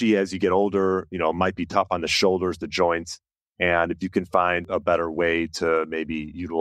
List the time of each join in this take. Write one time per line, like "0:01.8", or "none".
0:04.6